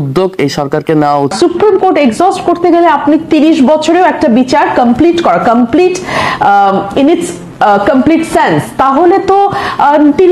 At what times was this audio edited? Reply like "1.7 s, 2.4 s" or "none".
1.3 s